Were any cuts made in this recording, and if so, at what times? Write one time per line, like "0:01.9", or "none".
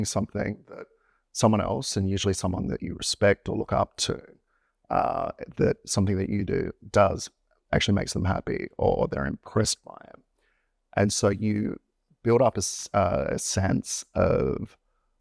none